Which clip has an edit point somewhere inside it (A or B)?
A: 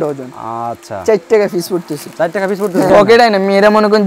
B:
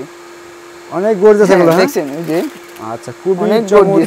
A